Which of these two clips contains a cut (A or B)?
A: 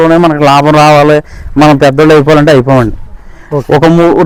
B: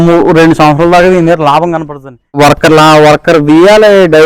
B